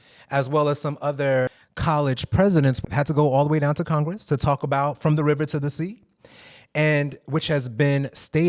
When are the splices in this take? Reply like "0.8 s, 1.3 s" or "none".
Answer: none